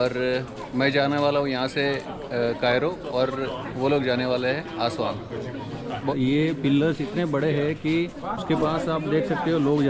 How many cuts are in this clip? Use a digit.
1